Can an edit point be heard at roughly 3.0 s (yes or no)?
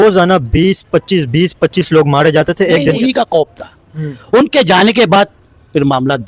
yes